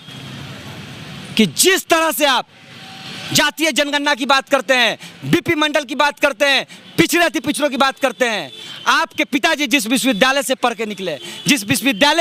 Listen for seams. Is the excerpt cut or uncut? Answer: uncut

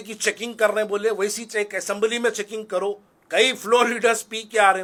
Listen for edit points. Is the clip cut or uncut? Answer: uncut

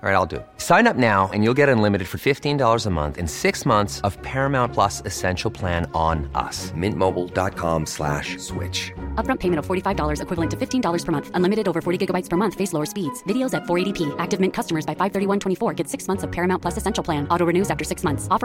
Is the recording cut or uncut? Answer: uncut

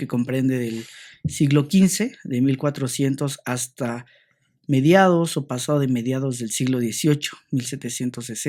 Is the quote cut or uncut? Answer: uncut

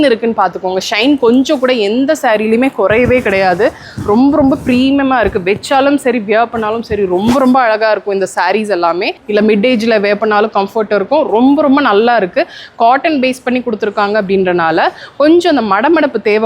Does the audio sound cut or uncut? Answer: cut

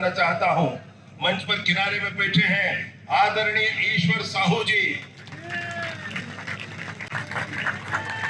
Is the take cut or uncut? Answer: uncut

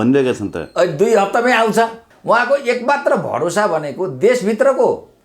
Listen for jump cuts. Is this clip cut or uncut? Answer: cut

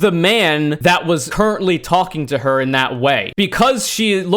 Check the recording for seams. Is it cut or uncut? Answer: cut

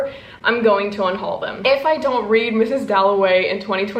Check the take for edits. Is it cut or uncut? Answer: cut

